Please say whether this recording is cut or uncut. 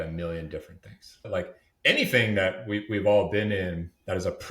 cut